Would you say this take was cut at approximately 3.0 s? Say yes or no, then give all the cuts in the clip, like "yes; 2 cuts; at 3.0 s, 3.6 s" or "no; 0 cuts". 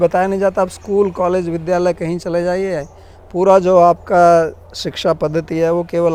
no; 0 cuts